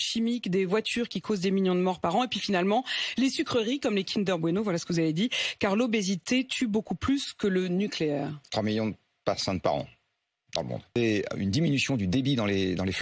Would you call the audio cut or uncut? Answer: cut